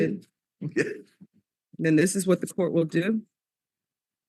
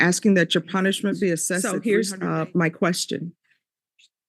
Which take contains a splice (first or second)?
second